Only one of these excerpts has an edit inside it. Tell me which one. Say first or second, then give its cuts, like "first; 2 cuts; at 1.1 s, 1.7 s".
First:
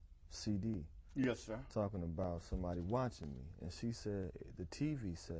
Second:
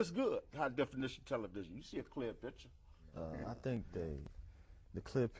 second; 1 cut; at 3.4 s